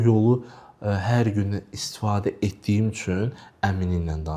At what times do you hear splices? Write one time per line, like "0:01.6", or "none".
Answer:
none